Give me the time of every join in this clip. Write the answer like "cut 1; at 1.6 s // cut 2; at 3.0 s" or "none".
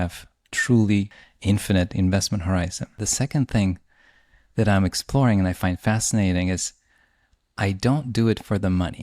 cut 1; at 1.2 s // cut 2; at 3.0 s